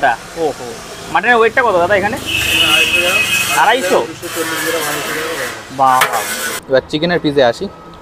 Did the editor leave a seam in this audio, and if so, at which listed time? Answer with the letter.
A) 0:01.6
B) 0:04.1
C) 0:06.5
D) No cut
C